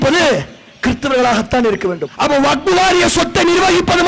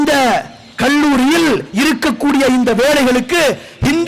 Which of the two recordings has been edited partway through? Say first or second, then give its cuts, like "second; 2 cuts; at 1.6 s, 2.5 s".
first; 1 cut; at 2.1 s